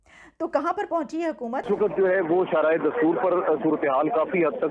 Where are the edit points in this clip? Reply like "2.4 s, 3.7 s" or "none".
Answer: 1.6 s